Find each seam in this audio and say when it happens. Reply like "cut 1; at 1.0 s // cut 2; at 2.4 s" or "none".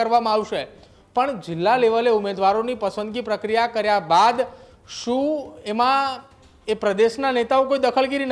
none